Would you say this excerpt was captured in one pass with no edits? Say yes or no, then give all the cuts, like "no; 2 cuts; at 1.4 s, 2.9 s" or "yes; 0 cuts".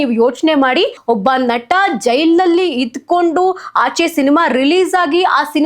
no; 1 cut; at 1.0 s